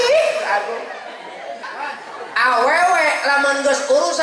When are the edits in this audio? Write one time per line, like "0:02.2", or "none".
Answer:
0:01.6